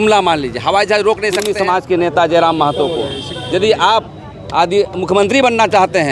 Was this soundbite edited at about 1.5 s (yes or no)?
yes